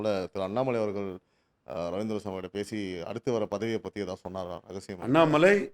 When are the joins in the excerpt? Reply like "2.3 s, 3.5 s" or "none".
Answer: none